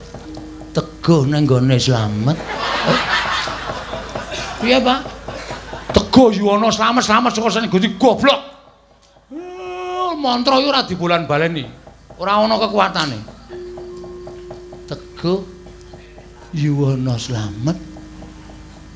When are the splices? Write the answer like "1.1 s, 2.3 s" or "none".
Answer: none